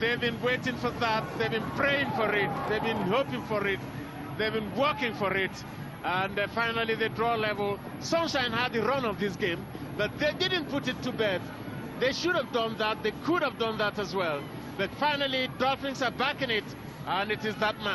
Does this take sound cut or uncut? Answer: uncut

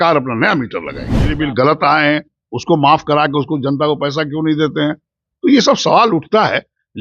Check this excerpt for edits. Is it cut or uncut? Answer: cut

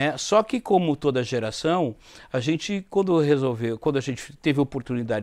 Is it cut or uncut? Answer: uncut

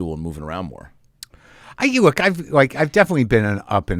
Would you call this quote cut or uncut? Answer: uncut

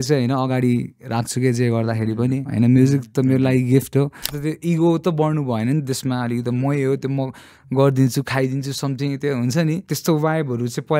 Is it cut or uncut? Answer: cut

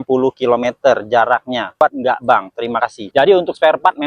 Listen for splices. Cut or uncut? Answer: cut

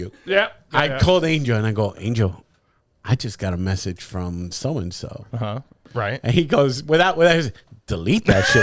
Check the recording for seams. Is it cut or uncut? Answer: cut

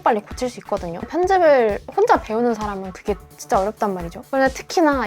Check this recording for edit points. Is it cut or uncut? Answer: cut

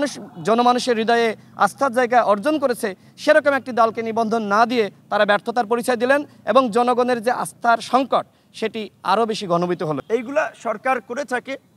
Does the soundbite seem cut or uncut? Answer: cut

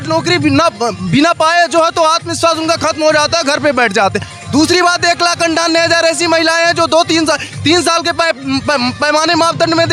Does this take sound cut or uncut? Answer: uncut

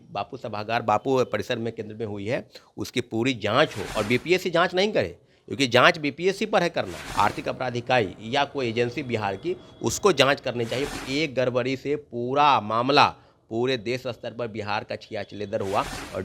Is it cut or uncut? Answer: cut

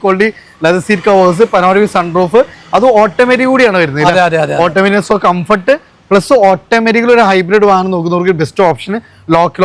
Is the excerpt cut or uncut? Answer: uncut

